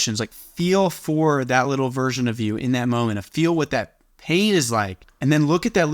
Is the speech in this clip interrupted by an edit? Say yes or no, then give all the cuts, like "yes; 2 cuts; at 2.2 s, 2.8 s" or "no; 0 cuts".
yes; 1 cut; at 5.0 s